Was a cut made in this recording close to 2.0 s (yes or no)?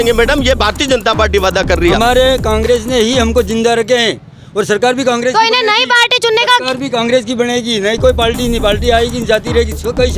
yes